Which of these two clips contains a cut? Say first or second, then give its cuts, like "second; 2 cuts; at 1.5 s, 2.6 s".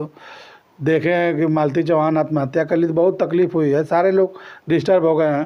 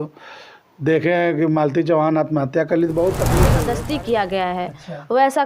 second; 1 cut; at 3.5 s